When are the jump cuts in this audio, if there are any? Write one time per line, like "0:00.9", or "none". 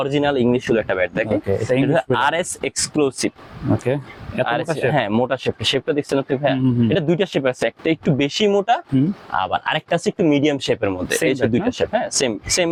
none